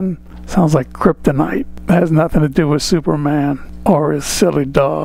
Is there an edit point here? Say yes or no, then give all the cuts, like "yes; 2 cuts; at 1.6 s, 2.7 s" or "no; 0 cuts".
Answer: yes; 2 cuts; at 1.7 s, 3.7 s